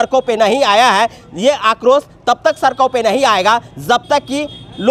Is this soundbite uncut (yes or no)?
yes